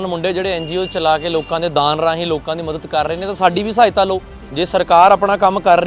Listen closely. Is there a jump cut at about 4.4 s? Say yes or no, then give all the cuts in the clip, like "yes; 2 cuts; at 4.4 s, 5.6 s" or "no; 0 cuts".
yes; 1 cut; at 4.4 s